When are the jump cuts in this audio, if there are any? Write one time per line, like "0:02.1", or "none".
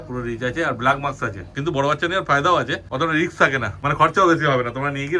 0:01.5
0:02.8
0:03.8